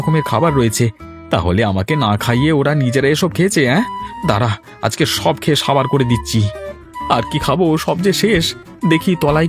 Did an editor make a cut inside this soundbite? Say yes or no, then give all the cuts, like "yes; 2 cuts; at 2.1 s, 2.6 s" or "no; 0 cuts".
yes; 1 cut; at 6.9 s